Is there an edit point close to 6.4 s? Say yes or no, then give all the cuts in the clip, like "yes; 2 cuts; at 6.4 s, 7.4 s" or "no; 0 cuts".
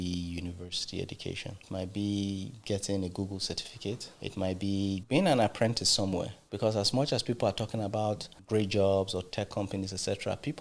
yes; 5 cuts; at 1.6 s, 4.1 s, 5.0 s, 6.4 s, 8.3 s